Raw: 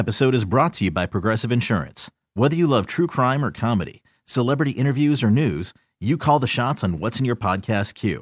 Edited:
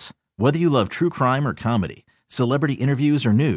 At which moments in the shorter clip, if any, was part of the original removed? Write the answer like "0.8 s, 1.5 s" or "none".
none